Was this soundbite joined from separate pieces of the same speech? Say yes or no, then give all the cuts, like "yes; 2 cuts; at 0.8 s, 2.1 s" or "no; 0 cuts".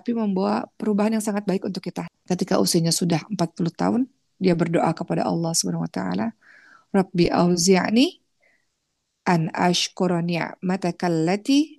yes; 1 cut; at 2.0 s